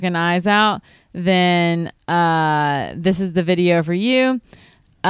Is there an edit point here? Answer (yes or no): no